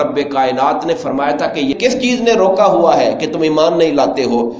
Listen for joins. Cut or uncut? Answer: cut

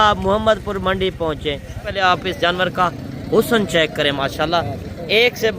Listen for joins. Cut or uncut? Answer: cut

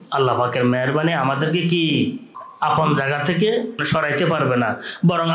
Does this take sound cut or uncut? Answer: cut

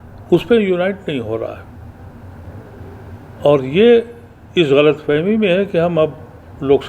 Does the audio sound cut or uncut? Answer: uncut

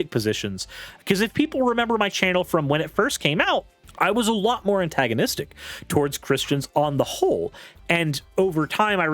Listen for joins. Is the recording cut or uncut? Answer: cut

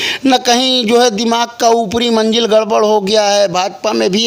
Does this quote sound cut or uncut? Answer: uncut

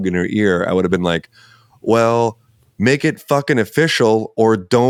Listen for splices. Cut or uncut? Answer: uncut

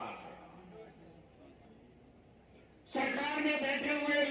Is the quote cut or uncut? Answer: cut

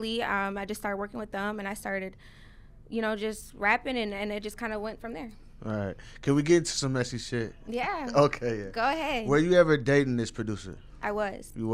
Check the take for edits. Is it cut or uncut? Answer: uncut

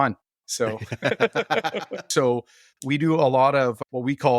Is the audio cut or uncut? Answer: cut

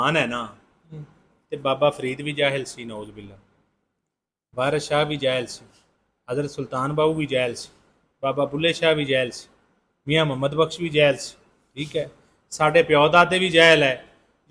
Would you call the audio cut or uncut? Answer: uncut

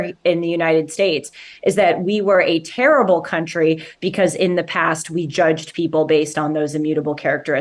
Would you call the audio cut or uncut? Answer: uncut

